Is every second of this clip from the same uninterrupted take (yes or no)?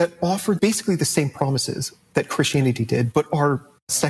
yes